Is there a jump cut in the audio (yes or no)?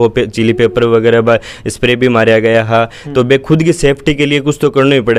no